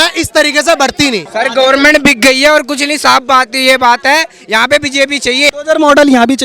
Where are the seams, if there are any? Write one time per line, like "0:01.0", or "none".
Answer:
0:01.3
0:05.5